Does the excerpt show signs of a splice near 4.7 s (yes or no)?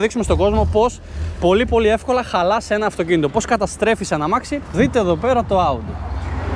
yes